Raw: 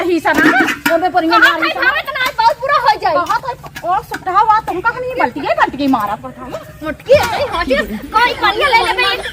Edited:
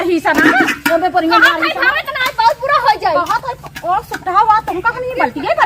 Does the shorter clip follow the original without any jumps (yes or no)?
yes